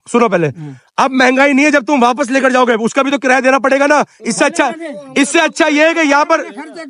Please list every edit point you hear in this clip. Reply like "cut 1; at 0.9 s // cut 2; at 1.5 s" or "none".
none